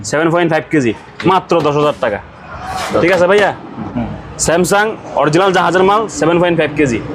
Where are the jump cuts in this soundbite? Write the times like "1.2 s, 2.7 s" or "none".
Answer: 3.8 s